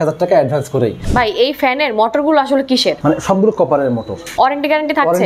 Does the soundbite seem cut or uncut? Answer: cut